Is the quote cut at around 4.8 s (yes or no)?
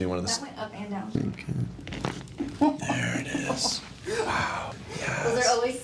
yes